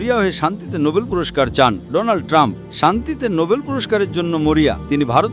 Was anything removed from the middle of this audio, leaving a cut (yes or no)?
yes